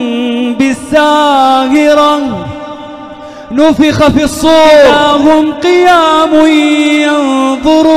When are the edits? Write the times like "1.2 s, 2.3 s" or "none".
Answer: 4.9 s